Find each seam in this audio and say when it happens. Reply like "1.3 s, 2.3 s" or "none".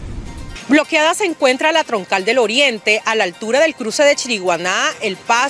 none